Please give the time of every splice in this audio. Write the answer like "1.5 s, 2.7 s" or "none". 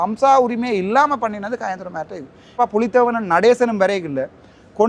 2.6 s